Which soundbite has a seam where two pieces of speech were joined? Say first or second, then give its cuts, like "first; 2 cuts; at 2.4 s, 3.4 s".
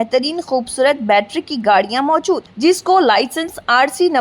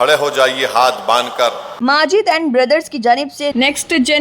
second; 1 cut; at 1.8 s